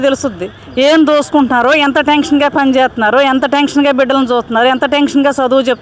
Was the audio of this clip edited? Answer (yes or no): no